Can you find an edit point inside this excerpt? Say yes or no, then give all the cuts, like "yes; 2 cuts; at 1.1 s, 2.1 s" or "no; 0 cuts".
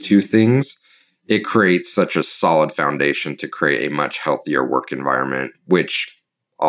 yes; 1 cut; at 5.5 s